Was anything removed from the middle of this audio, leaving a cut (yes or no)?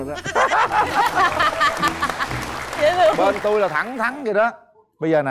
no